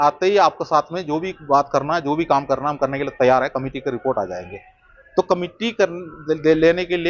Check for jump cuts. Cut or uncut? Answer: uncut